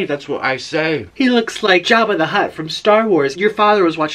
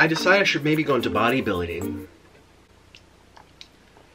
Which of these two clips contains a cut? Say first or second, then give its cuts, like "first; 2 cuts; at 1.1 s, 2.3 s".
first; 3 cuts; at 1.1 s, 1.8 s, 3.3 s